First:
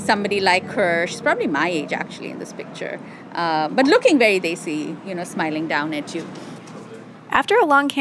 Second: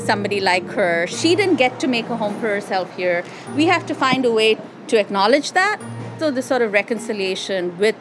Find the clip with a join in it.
second; 3 cuts; at 1.2 s, 4.7 s, 6.1 s

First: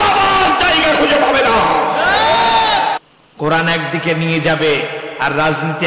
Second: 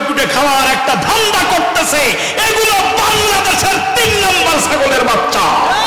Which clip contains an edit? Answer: first; 1 cut; at 3.0 s

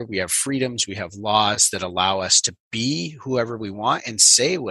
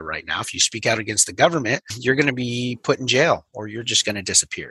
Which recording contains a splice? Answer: second; 1 cut; at 2.0 s

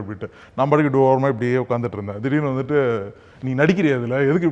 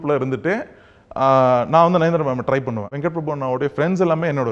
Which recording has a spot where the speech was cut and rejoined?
second; 1 cut; at 2.9 s

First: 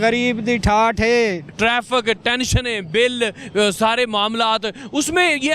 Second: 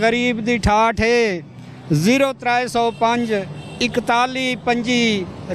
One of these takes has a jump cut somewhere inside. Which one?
first; 1 cut; at 1.5 s

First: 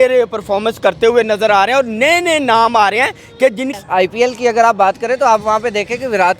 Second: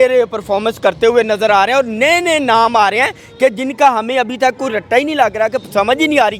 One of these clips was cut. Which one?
first; 1 cut; at 3.7 s

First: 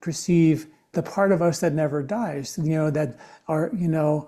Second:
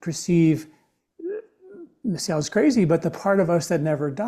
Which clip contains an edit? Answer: first; 1 cut; at 0.9 s

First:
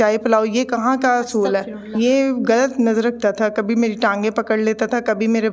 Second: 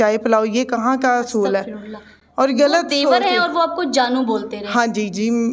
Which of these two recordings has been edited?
first; 1 cut; at 1.8 s

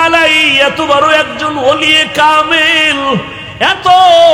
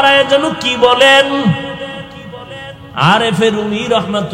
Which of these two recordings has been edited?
first; 1 cut; at 3.4 s

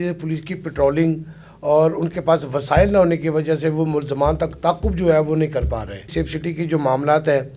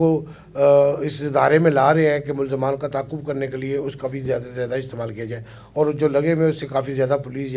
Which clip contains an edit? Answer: first; 1 cut; at 6.0 s

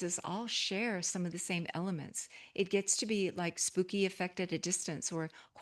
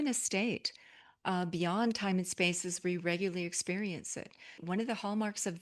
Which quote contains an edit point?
second; 1 cut; at 4.6 s

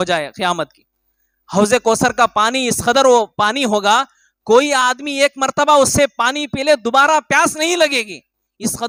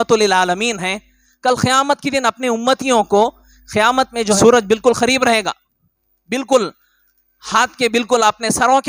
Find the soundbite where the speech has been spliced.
second; 1 cut; at 4.4 s

